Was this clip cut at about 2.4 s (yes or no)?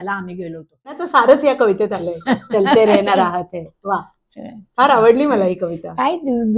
no